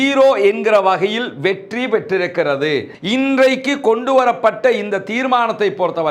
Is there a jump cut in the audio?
yes; 1 cut; at 3.0 s

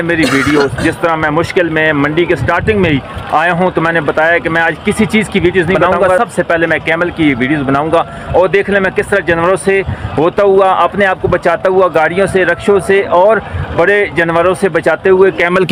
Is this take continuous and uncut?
yes; 0 cuts

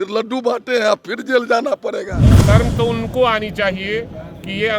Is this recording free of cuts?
no; 1 cut; at 2.3 s

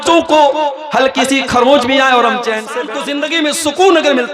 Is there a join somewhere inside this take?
yes; 1 cut; at 3.1 s

